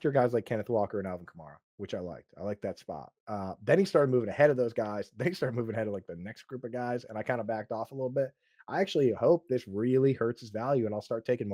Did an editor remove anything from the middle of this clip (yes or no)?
no